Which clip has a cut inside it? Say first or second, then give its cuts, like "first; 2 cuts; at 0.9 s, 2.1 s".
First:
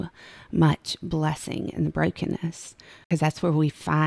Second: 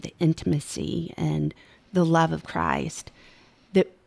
first; 1 cut; at 3.1 s